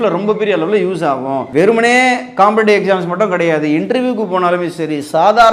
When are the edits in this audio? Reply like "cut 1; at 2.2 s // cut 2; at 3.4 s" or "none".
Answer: cut 1; at 1.4 s

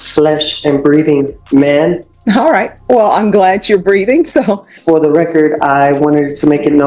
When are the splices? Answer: cut 1; at 2.1 s // cut 2; at 4.7 s

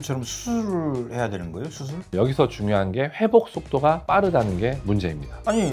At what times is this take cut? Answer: cut 1; at 2.0 s

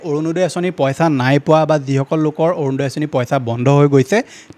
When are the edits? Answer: none

